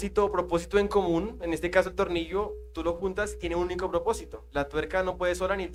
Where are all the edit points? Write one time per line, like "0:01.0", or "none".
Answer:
none

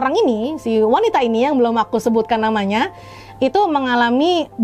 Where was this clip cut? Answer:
none

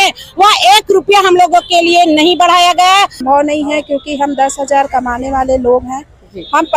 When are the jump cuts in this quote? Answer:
0:03.2

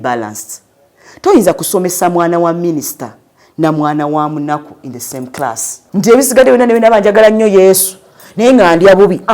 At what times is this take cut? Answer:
0:05.7

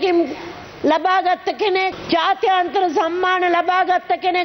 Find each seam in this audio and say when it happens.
0:02.0

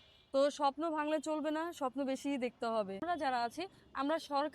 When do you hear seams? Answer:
0:03.0

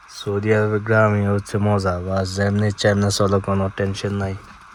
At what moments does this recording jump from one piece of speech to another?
none

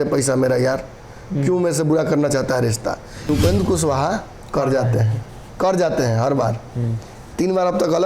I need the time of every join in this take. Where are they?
0:03.3

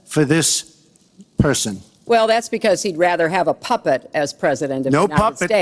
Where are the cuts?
0:01.9

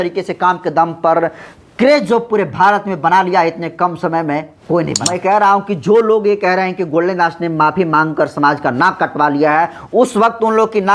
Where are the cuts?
0:05.1

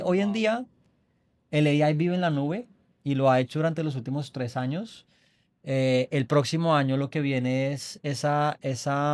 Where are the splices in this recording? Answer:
none

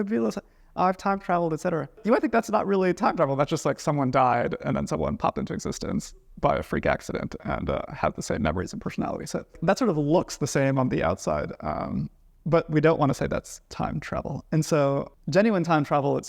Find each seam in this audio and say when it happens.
0:02.0
0:09.6
0:15.2

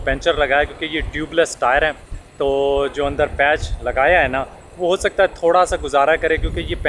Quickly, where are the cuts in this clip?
none

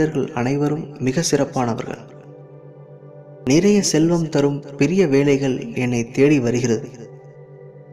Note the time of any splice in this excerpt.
0:02.0
0:03.4

